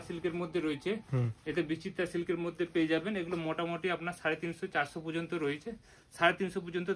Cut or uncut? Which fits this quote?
uncut